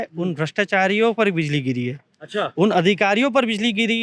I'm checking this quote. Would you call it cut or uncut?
uncut